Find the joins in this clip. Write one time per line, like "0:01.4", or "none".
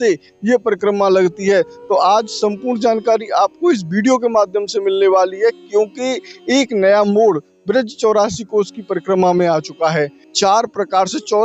0:10.2